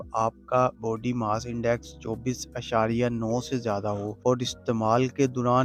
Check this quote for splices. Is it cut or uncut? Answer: uncut